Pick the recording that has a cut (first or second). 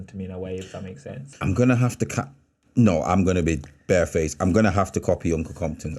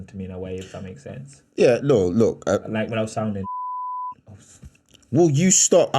first